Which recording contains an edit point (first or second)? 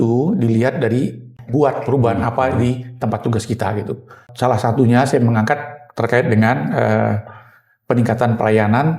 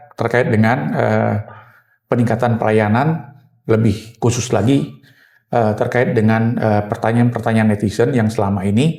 first